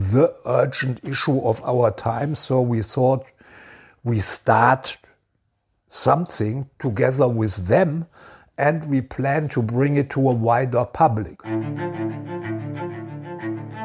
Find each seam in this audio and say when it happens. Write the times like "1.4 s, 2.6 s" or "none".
11.6 s